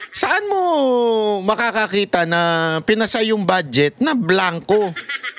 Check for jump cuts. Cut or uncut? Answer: uncut